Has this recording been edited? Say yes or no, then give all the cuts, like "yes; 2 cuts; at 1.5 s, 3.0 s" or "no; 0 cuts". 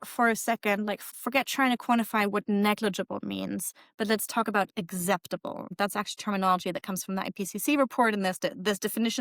yes; 2 cuts; at 1.1 s, 5.7 s